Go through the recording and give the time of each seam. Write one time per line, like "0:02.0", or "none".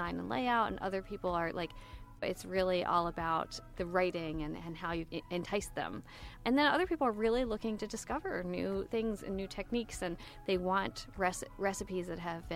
0:02.2
0:03.6
0:05.1
0:06.3